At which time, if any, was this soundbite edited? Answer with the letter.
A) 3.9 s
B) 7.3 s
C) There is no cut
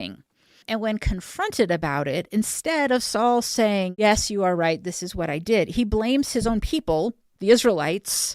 A